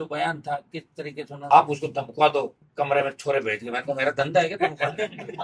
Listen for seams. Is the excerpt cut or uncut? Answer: cut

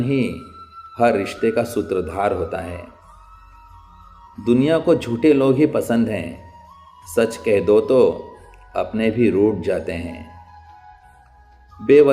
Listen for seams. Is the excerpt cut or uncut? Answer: cut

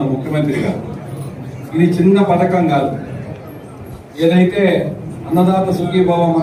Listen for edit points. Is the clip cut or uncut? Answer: uncut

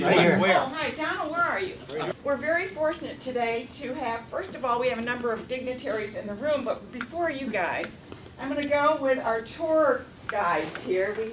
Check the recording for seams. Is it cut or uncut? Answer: uncut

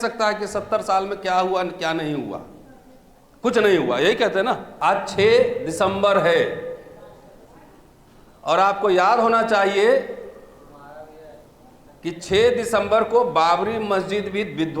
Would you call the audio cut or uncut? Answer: cut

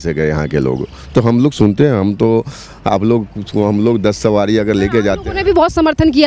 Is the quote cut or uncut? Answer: uncut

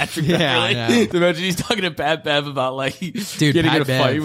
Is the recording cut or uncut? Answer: cut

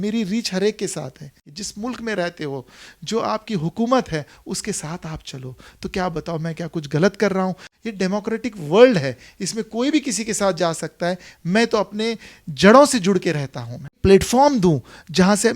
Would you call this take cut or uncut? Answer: cut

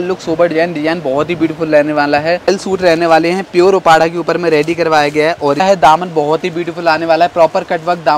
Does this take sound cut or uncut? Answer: cut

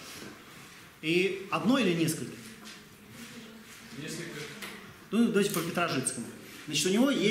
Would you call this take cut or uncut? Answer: uncut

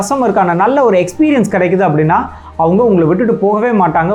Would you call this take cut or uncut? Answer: uncut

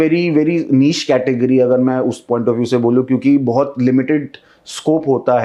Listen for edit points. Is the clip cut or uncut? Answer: uncut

